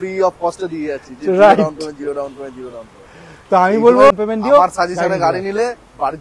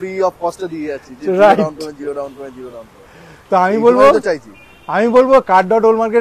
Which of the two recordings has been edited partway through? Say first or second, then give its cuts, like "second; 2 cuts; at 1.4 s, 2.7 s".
first; 1 cut; at 4.1 s